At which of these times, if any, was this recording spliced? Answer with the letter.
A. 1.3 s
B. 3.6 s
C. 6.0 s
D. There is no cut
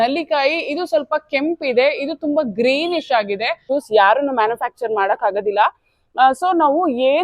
B